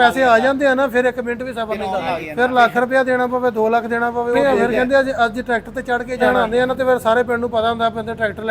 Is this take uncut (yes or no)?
no